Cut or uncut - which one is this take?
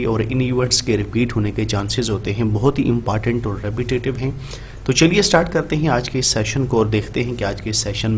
uncut